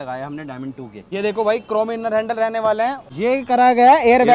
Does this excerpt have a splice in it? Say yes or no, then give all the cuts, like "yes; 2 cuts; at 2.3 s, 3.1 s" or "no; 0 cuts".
yes; 2 cuts; at 1.0 s, 3.0 s